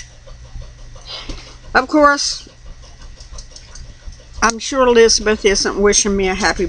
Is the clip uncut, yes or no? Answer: yes